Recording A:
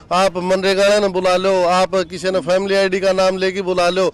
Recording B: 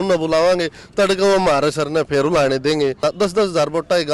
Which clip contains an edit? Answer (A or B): B